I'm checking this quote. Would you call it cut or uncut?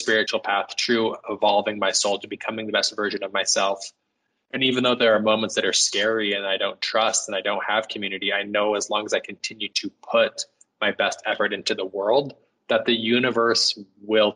uncut